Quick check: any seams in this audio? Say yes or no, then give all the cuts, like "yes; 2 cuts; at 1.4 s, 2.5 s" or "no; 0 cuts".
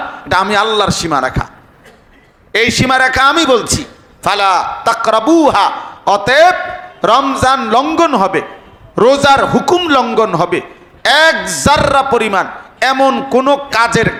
no; 0 cuts